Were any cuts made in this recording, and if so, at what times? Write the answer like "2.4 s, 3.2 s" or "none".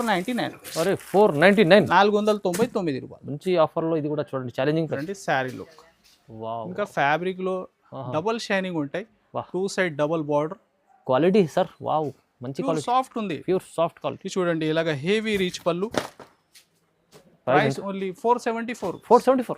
5.0 s, 15.9 s